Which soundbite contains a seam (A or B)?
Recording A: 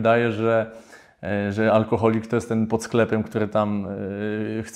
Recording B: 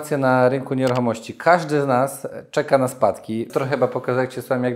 B